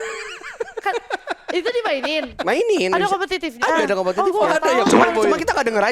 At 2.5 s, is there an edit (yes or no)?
no